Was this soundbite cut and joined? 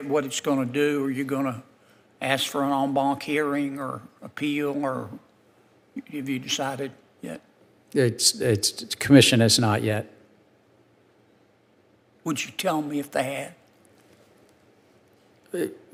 no; 0 cuts

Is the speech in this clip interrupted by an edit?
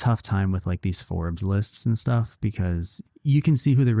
yes; 1 cut; at 2.9 s

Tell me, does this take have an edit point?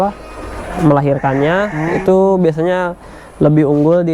no; 0 cuts

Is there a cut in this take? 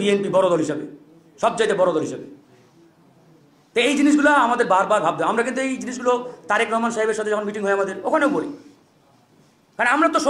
no; 0 cuts

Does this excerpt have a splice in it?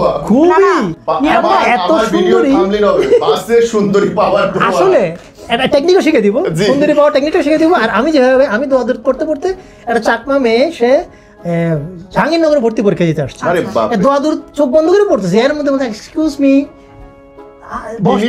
no; 0 cuts

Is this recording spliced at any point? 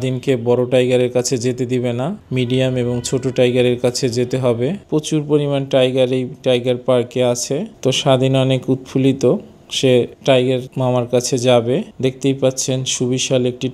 yes; 3 cuts; at 4.8 s, 7.7 s, 11.9 s

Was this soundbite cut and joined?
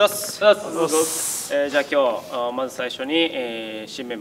no; 0 cuts

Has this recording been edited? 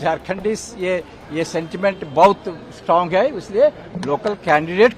no; 0 cuts

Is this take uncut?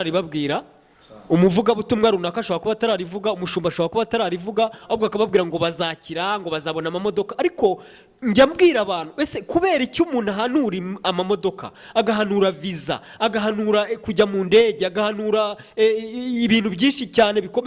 yes; 0 cuts

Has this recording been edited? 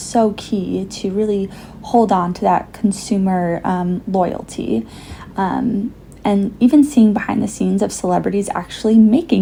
no; 0 cuts

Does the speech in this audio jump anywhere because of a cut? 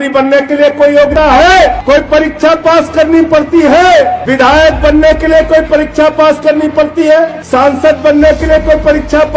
yes; 4 cuts; at 1.1 s, 1.8 s, 4.2 s, 7.4 s

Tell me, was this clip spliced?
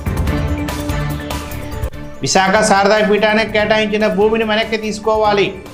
no; 0 cuts

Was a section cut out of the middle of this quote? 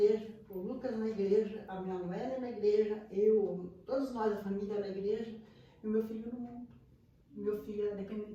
no; 0 cuts

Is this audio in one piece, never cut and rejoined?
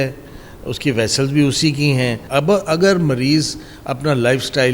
no; 1 cut; at 2.2 s

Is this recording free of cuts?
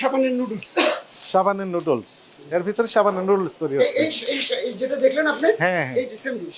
yes; 0 cuts

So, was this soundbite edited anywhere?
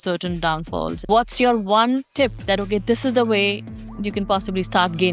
yes; 2 cuts; at 1.0 s, 2.4 s

